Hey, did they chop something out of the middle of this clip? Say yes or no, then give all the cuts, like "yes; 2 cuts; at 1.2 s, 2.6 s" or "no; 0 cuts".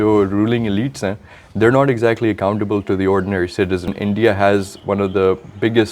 yes; 1 cut; at 3.9 s